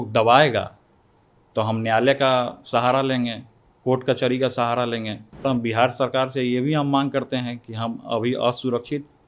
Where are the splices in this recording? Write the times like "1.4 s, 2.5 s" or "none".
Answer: 5.4 s